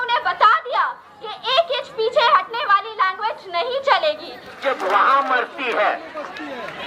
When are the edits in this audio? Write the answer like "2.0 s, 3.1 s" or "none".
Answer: 4.6 s